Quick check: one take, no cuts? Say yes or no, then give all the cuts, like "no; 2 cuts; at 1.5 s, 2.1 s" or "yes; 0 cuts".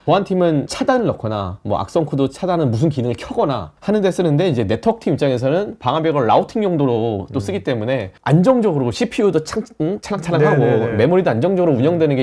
yes; 0 cuts